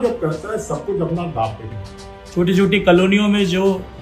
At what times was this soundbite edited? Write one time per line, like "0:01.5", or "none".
0:02.2